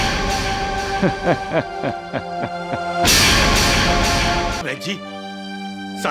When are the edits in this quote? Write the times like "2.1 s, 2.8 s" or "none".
4.6 s